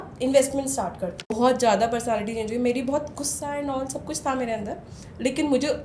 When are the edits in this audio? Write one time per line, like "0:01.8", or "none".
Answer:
0:01.3